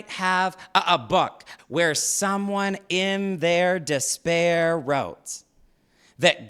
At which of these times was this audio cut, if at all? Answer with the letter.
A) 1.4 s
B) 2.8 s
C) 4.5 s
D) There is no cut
A